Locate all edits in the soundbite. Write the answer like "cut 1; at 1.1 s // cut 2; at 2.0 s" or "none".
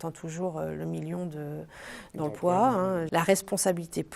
cut 1; at 3.1 s

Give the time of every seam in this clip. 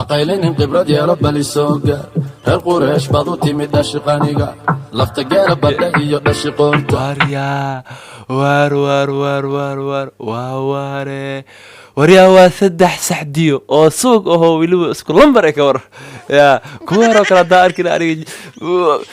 cut 1; at 7.0 s

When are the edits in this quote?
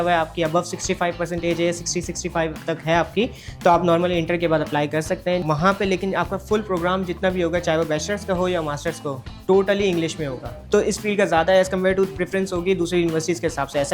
cut 1; at 5.4 s // cut 2; at 10.5 s

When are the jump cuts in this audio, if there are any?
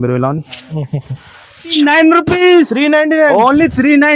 cut 1; at 1.7 s

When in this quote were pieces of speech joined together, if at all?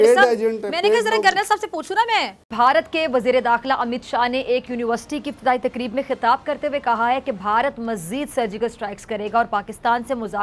cut 1; at 2.4 s

